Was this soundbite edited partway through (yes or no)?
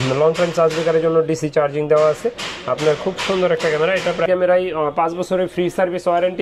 yes